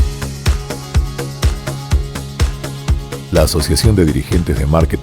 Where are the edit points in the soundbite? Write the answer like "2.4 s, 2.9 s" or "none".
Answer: 2.8 s